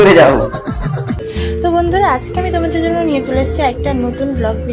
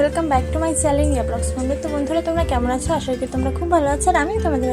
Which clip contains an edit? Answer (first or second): first